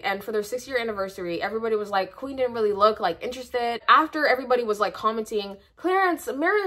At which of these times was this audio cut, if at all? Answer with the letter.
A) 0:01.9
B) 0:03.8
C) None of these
B